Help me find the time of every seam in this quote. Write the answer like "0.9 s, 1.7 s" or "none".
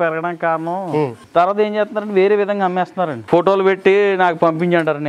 1.2 s, 3.2 s